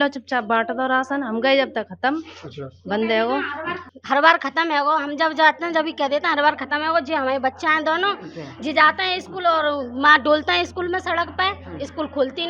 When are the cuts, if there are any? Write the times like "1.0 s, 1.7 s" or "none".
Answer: 3.9 s